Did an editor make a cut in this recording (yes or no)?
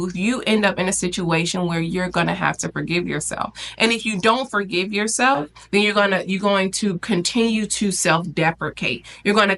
no